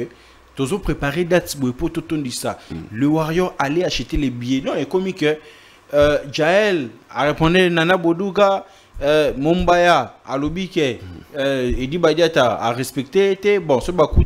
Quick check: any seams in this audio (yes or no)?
no